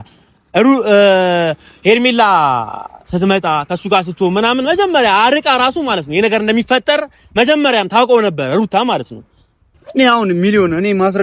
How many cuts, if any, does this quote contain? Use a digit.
1